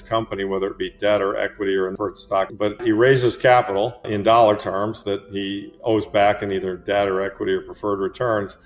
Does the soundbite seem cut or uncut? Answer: cut